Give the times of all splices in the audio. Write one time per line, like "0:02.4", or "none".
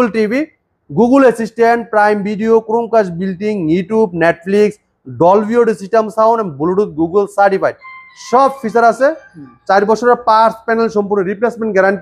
none

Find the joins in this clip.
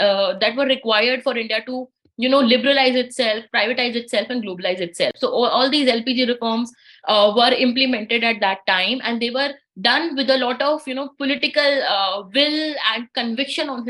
none

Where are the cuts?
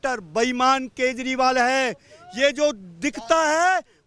none

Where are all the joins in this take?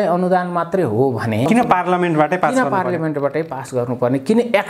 0:01.5

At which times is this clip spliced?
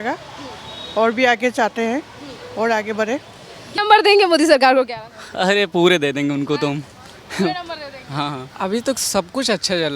0:03.7
0:08.5

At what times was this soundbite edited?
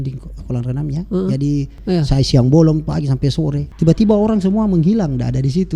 0:01.7
0:03.6

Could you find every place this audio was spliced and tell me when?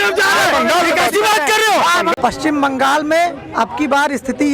0:02.2

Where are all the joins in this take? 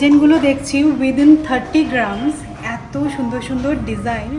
none

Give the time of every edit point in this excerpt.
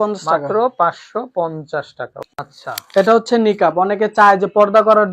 0:02.5

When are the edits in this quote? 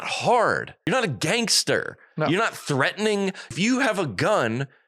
0:00.8
0:03.5

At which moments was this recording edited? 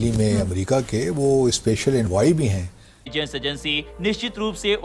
none

